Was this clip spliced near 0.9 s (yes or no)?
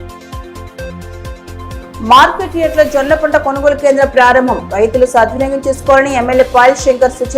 yes